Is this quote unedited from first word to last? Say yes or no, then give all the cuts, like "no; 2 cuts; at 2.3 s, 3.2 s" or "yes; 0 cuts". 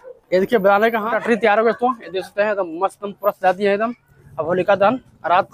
no; 1 cut; at 1.0 s